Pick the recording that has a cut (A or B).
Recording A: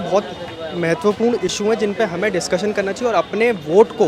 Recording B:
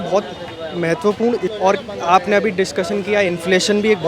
B